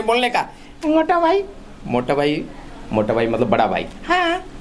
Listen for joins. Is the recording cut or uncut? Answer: uncut